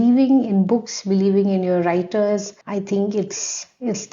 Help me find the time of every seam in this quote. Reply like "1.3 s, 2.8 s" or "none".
2.6 s